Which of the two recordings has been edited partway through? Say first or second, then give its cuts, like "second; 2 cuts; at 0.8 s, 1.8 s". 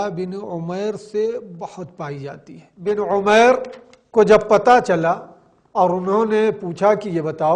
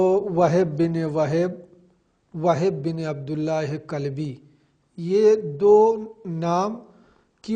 first; 1 cut; at 2.9 s